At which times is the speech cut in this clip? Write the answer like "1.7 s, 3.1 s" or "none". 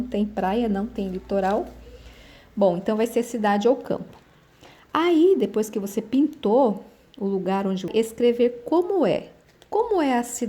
7.9 s

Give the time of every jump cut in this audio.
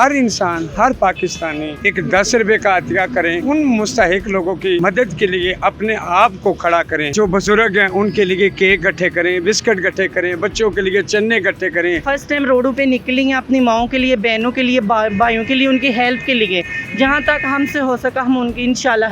1.7 s, 3.4 s, 7.1 s, 12.0 s

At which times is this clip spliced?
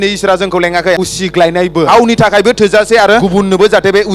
1.0 s, 1.9 s, 3.2 s

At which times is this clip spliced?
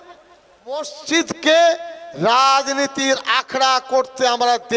1.0 s

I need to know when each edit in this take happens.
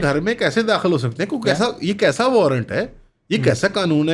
none

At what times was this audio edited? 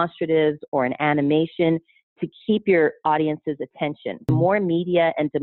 4.3 s

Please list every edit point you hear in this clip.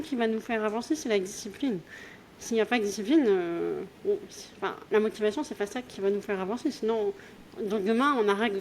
none

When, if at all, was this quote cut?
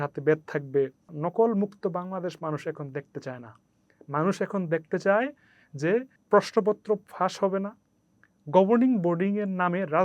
1.1 s, 6.1 s

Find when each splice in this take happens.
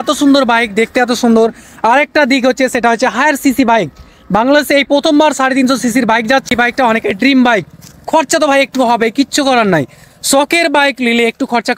6.5 s

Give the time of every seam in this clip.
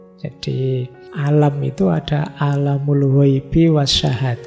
1.0 s

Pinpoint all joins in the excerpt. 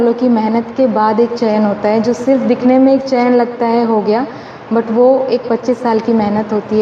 none

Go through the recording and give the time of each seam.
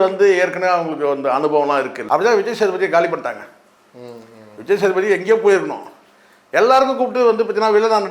2.0 s

